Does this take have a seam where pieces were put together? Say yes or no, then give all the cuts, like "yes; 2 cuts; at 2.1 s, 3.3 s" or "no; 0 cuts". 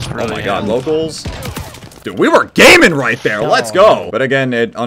no; 0 cuts